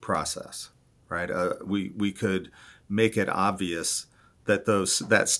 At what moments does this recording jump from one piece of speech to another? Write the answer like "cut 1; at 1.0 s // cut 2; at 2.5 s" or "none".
none